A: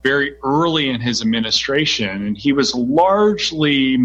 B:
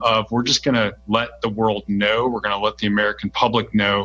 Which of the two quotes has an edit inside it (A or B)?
B